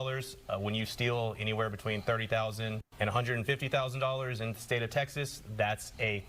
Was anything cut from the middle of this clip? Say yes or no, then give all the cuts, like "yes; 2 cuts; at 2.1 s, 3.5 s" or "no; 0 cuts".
yes; 1 cut; at 2.8 s